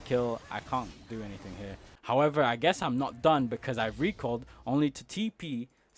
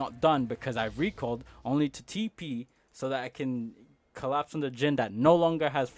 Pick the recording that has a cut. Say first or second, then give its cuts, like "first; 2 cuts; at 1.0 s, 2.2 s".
first; 1 cut; at 1.9 s